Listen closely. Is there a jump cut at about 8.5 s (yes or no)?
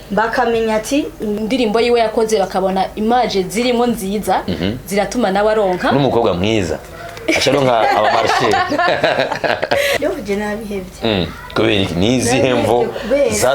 no